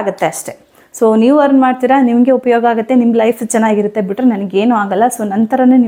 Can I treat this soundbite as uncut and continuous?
yes; 0 cuts

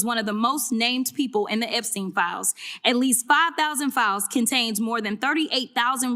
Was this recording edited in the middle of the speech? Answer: no; 0 cuts

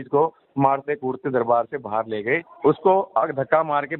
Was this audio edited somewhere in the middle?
yes; 1 cut; at 2.5 s

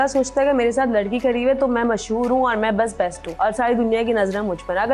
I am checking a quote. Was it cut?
yes; 1 cut; at 3.2 s

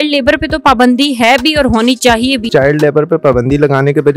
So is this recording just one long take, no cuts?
no; 1 cut; at 2.4 s

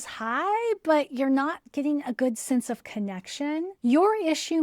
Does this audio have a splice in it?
yes; 1 cut; at 1.6 s

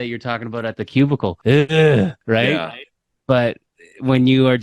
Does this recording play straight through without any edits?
no; 2 cuts; at 1.4 s, 2.2 s

